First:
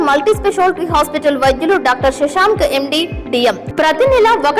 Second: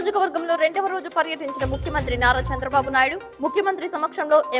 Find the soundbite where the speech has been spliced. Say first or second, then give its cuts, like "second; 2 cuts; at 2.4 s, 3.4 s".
first; 1 cut; at 3.7 s